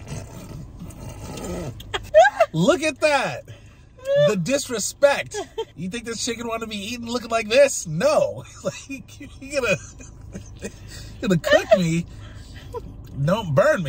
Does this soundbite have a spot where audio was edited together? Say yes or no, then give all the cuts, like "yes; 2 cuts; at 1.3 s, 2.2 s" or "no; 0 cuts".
yes; 2 cuts; at 2.1 s, 5.7 s